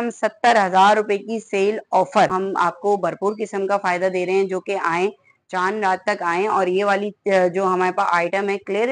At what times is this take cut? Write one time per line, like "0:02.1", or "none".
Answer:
0:02.3